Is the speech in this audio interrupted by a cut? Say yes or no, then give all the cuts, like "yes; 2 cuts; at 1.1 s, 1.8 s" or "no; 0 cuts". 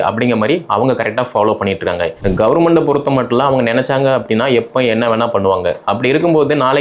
yes; 1 cut; at 2.1 s